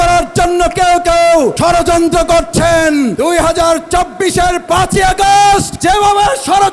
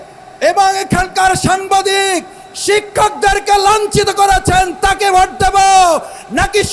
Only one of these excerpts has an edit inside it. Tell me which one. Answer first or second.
first